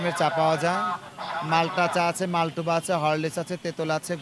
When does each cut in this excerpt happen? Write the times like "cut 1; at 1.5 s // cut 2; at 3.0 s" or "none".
none